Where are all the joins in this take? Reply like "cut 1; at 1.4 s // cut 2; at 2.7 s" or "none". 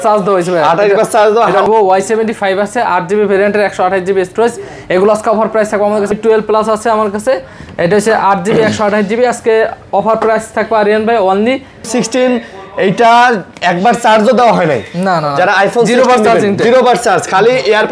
cut 1; at 1.7 s // cut 2; at 6.1 s // cut 3; at 11.9 s